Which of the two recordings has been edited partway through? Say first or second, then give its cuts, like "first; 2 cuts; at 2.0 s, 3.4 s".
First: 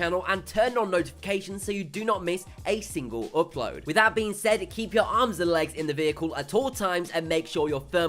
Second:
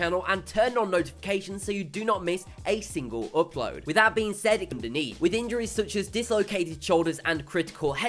first; 1 cut; at 4.7 s